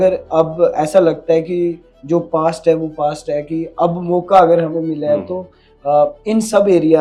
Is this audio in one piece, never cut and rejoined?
yes; 0 cuts

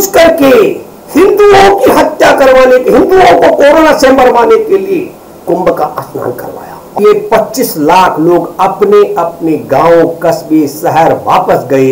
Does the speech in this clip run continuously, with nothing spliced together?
no; 1 cut; at 7.0 s

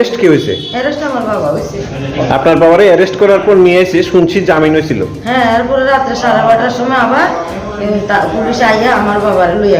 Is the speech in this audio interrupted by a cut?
yes; 1 cut; at 2.2 s

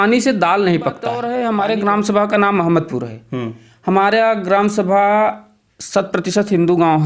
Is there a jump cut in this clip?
yes; 1 cut; at 1.2 s

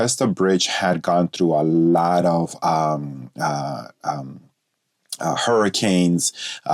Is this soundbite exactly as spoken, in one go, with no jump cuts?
yes; 0 cuts

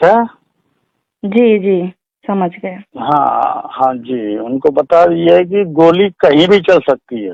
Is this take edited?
no; 0 cuts

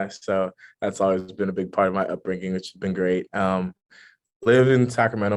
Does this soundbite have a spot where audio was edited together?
no; 0 cuts

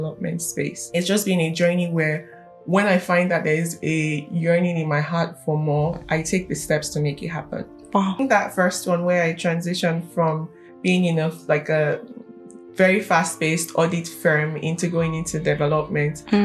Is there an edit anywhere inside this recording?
yes; 2 cuts; at 0.8 s, 8.2 s

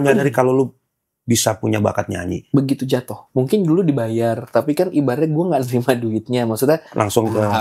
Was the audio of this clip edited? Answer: yes; 2 cuts; at 2.3 s, 3.2 s

